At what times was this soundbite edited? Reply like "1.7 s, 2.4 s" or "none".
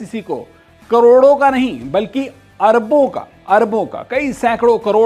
none